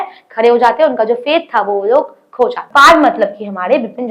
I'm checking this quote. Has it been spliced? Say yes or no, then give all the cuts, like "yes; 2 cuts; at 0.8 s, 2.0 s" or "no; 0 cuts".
yes; 1 cut; at 2.6 s